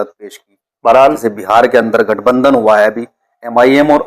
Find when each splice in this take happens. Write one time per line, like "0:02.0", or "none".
0:01.2